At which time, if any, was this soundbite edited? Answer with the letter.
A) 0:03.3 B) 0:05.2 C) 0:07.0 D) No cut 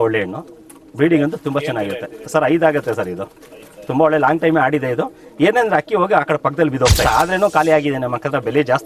C